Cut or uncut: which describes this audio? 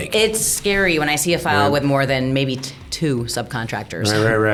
uncut